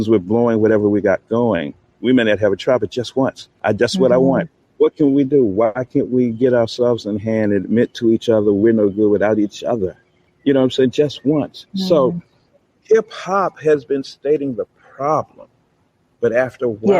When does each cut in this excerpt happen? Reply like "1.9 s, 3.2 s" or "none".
3.5 s